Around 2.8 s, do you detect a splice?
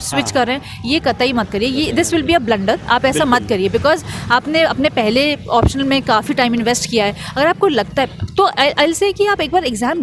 no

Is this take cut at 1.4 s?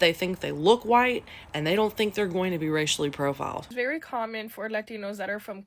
no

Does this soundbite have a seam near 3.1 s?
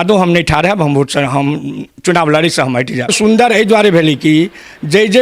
yes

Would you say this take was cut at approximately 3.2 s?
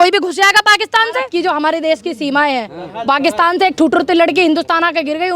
no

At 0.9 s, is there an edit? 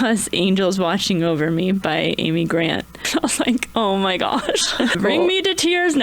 no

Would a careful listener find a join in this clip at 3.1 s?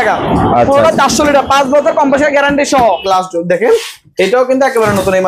yes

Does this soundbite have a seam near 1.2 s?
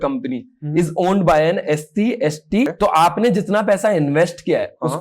no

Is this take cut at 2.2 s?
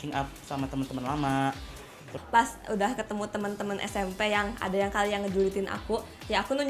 yes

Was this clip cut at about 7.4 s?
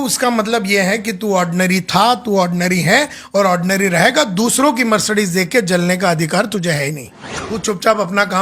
yes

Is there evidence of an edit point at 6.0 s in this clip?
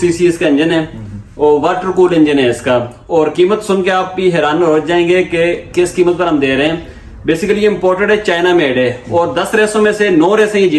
no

